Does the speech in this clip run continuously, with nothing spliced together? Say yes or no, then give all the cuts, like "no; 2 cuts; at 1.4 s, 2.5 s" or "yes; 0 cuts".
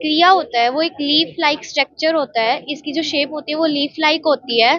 yes; 0 cuts